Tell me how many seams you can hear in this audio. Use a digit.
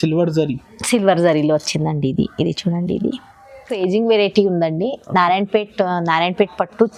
1